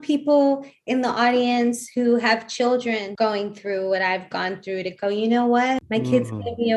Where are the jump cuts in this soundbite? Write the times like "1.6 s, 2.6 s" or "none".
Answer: 3.1 s, 5.8 s